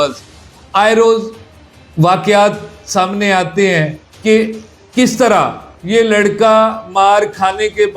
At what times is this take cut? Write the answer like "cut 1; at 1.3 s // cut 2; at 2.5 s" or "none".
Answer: cut 1; at 4.0 s